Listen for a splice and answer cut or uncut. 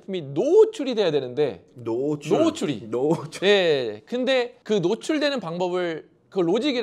uncut